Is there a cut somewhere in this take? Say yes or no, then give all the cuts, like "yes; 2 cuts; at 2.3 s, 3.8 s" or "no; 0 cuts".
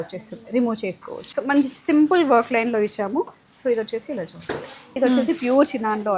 yes; 2 cuts; at 1.2 s, 5.0 s